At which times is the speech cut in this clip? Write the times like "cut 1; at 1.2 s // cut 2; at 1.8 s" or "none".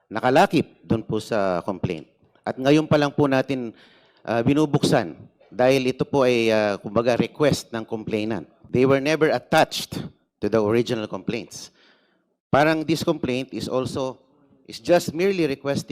cut 1; at 8.5 s